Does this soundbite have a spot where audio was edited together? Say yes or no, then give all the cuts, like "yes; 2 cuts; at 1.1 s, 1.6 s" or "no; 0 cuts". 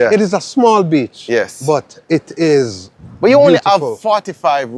no; 0 cuts